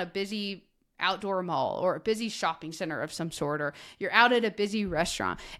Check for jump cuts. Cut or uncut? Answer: uncut